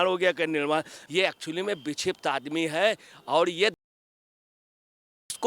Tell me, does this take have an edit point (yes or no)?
yes